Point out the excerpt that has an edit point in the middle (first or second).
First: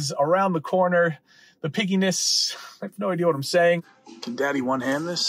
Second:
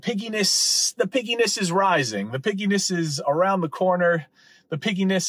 first